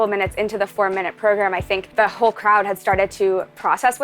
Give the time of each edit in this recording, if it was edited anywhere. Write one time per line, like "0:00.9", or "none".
0:01.9